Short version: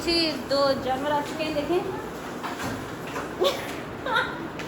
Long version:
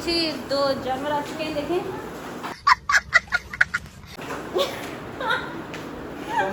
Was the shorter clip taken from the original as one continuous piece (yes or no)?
no